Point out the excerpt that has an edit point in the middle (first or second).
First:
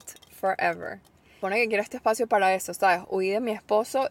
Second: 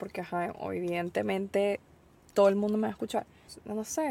first